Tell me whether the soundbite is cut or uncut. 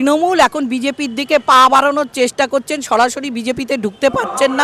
uncut